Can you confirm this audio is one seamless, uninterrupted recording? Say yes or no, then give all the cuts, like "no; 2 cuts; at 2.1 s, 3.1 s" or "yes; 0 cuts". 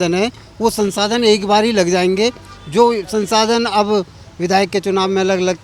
yes; 0 cuts